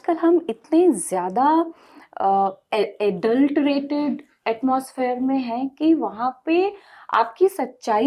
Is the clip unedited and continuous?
yes; 0 cuts

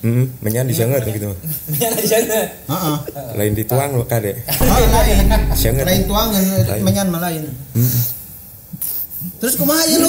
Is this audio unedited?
no; 1 cut; at 7.7 s

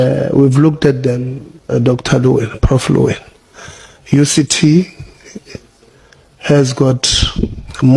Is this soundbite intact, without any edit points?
yes; 0 cuts

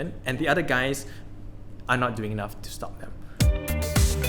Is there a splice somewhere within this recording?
yes; 1 cut; at 3.2 s

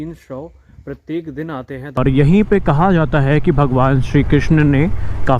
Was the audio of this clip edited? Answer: yes; 1 cut; at 2.0 s

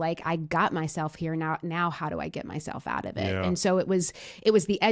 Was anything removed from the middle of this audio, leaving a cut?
no; 0 cuts

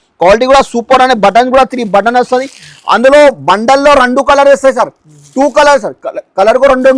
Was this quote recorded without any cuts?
yes; 0 cuts

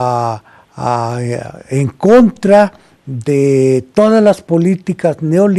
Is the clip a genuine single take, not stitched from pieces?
no; 1 cut; at 2.3 s

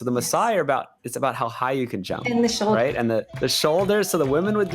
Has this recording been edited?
yes; 1 cut; at 3.3 s

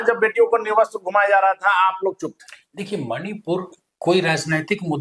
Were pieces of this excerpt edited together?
no; 0 cuts

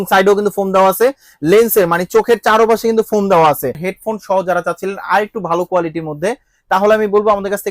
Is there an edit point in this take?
yes; 1 cut; at 3.9 s

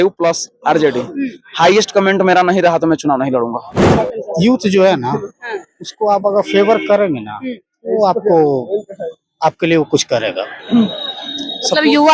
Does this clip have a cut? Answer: yes; 1 cut; at 3.9 s

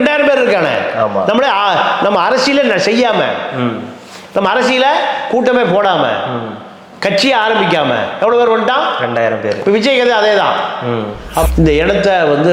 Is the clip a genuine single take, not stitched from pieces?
no; 1 cut; at 11.5 s

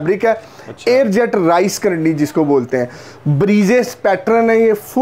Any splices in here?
no; 0 cuts

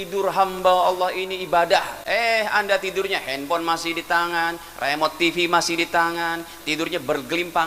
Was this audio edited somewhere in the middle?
yes; 1 cut; at 2.0 s

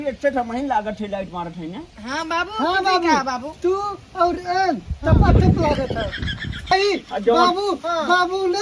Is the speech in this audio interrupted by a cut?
yes; 1 cut; at 6.2 s

